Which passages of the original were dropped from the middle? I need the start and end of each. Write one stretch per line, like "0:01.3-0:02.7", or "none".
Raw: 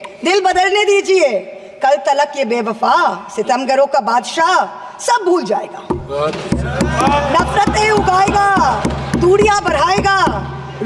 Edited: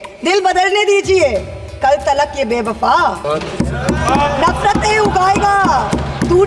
0:03.2-0:06.1